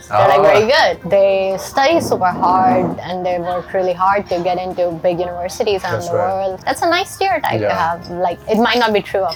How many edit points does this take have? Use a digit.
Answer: 0